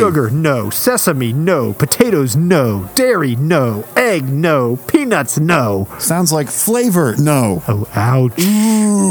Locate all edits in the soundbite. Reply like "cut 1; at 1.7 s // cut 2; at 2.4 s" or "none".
none

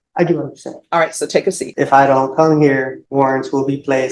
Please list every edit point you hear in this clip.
cut 1; at 1.7 s // cut 2; at 3.0 s

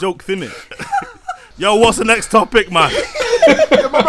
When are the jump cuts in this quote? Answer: cut 1; at 1.4 s

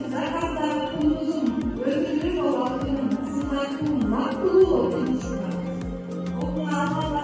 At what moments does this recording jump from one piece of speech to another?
none

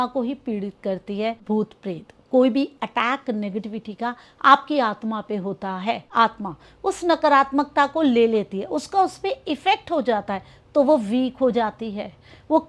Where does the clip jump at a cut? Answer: cut 1; at 1.4 s // cut 2; at 6.0 s

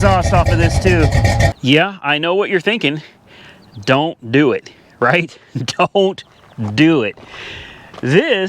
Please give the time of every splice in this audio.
cut 1; at 1.5 s

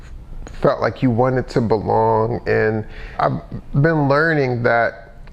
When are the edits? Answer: cut 1; at 3.1 s

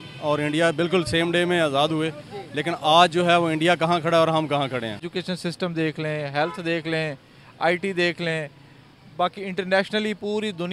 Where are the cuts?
cut 1; at 5.1 s

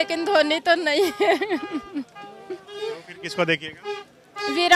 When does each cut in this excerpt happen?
none

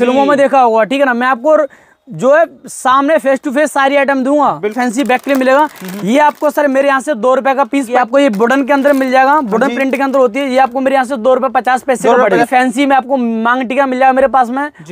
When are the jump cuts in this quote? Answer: cut 1; at 4.8 s // cut 2; at 7.9 s // cut 3; at 12.4 s

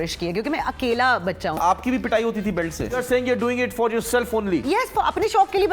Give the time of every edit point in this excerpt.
cut 1; at 1.6 s // cut 2; at 3.1 s

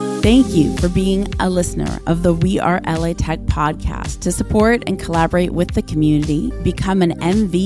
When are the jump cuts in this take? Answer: none

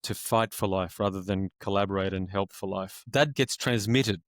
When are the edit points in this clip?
cut 1; at 3.3 s

